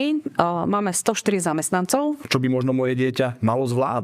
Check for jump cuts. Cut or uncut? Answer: cut